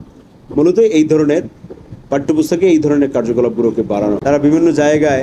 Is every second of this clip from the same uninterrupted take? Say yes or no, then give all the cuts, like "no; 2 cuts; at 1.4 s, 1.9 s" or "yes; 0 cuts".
no; 1 cut; at 4.2 s